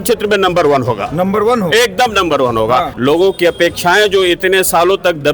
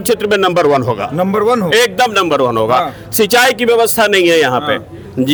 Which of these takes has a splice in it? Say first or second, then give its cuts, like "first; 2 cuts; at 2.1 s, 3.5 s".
first; 1 cut; at 2.9 s